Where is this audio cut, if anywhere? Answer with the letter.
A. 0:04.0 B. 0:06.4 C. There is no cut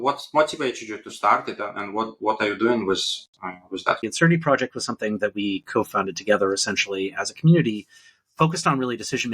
A